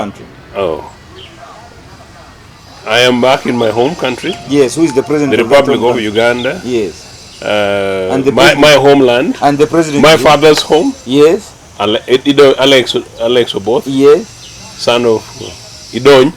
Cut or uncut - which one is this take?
uncut